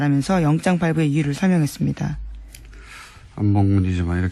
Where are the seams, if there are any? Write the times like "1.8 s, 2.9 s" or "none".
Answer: 1.3 s